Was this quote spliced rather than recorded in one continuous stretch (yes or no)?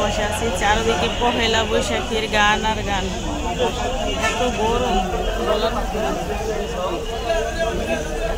no